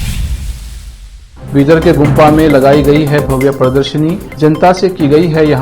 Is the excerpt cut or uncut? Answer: cut